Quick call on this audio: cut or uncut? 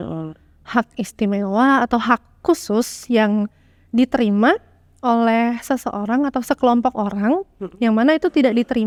uncut